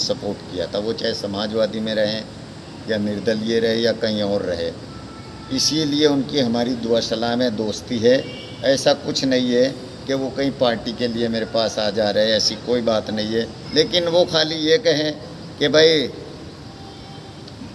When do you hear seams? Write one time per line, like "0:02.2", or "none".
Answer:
0:13.6